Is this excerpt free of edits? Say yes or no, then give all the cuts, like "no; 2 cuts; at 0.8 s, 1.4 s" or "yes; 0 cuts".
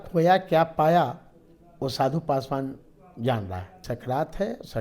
no; 1 cut; at 3.8 s